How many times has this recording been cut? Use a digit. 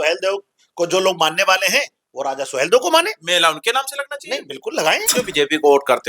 1